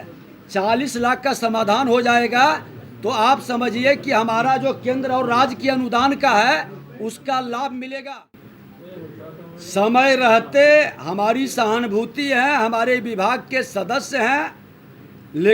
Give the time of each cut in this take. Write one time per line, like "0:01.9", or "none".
0:08.1